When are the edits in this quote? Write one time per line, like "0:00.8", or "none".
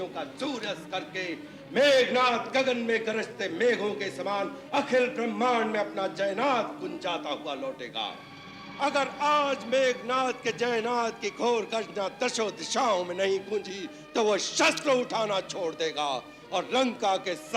none